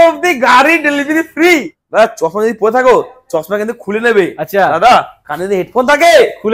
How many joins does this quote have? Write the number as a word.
one